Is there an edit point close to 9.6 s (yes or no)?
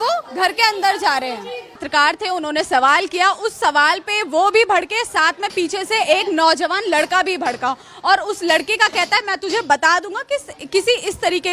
no